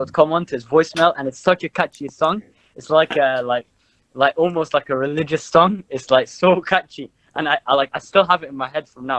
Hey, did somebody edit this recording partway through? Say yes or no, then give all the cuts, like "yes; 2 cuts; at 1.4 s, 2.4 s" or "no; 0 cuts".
no; 0 cuts